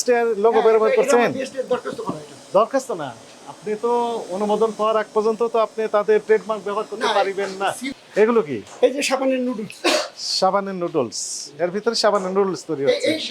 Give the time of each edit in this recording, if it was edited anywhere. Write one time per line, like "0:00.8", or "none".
0:07.9